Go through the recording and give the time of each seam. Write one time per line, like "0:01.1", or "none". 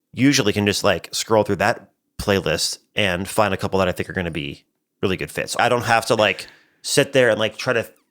0:05.6